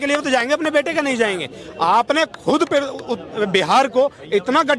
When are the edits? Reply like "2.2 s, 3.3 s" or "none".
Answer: none